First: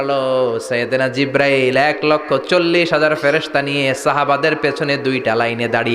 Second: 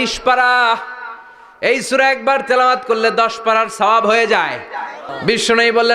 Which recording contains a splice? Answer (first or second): second